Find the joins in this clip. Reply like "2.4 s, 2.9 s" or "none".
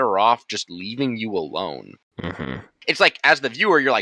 2.5 s